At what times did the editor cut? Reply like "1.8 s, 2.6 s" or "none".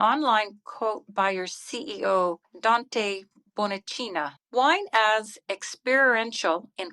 4.4 s